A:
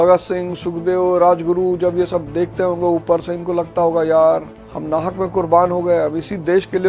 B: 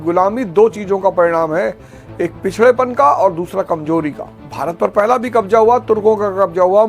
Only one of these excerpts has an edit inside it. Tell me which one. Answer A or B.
B